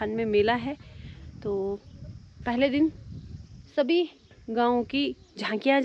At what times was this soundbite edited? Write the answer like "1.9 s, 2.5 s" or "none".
none